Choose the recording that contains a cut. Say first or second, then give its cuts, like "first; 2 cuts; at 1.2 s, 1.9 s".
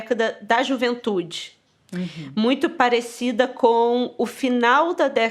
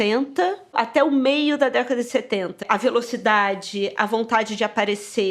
second; 2 cuts; at 0.7 s, 2.5 s